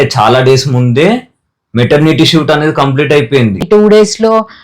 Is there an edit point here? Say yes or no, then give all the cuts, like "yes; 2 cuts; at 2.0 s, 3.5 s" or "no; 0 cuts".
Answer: yes; 1 cut; at 3.6 s